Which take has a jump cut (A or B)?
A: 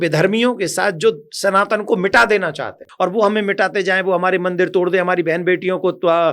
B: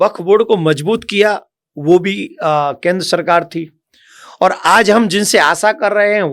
A